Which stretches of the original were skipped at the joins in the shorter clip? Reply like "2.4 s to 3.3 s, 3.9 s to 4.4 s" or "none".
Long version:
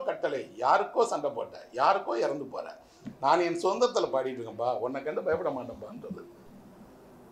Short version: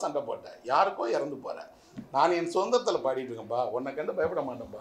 none